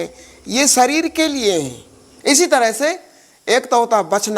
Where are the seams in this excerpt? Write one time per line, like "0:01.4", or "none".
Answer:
0:02.1